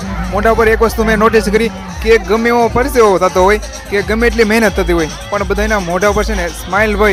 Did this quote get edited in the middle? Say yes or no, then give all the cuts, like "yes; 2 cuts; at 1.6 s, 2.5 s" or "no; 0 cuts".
no; 0 cuts